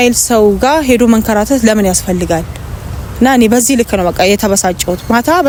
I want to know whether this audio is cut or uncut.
uncut